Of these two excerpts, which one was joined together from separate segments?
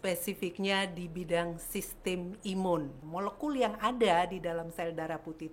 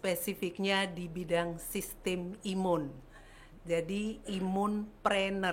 first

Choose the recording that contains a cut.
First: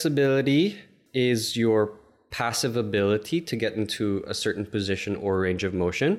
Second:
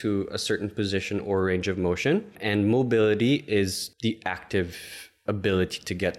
second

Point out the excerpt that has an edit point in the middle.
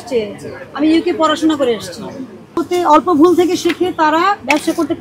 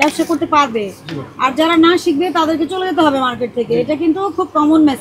first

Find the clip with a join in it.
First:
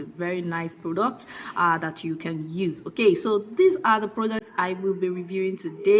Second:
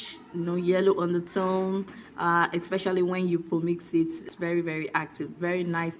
second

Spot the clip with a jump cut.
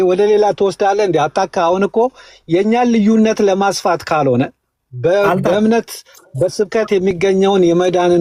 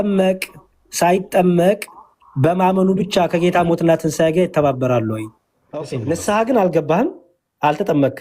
second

